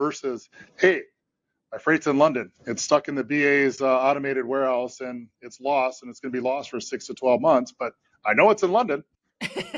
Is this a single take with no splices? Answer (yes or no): yes